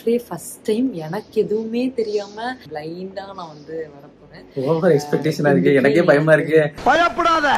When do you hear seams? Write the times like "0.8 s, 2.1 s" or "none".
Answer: 2.7 s